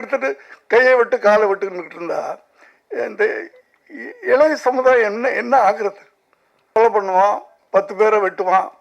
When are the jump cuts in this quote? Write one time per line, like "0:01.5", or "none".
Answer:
0:06.8